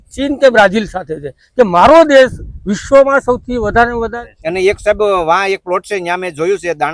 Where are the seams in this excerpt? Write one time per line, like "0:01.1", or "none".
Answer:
0:04.1